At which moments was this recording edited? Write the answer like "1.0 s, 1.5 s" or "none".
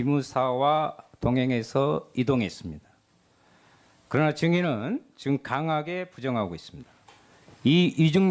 none